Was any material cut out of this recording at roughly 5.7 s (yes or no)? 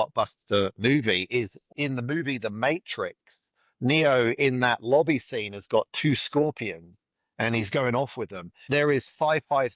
no